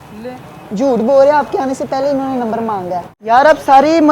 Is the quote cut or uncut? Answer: cut